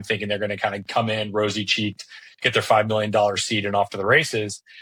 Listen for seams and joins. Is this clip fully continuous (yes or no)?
yes